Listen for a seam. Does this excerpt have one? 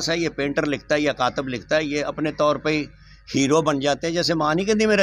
no; 0 cuts

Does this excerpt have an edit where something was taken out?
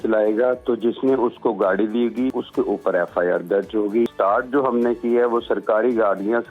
yes; 2 cuts; at 2.3 s, 4.1 s

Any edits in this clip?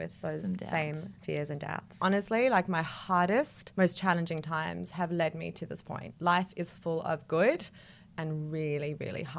yes; 3 cuts; at 1.9 s, 3.6 s, 6.0 s

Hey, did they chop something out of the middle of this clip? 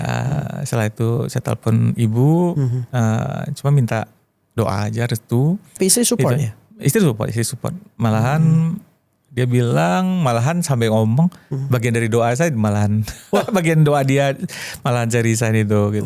yes; 1 cut; at 5.7 s

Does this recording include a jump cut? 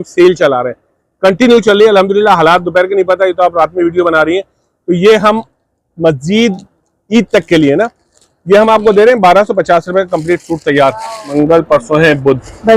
yes; 1 cut; at 11.3 s

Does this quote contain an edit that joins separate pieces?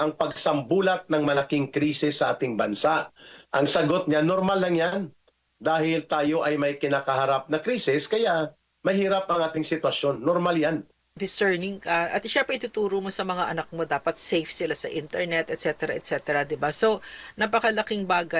yes; 1 cut; at 11.1 s

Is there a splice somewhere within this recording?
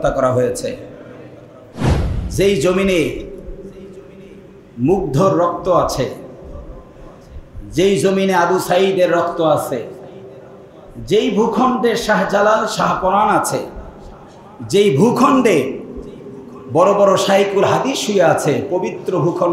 yes; 1 cut; at 2.0 s

